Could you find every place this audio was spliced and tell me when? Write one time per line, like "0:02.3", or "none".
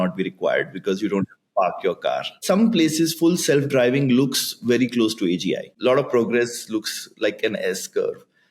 0:02.4
0:05.7